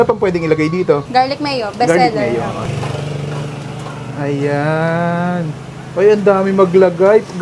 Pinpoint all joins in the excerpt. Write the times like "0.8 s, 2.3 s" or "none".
1.0 s, 2.7 s